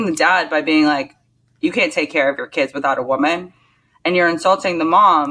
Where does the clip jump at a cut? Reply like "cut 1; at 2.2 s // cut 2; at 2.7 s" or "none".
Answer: none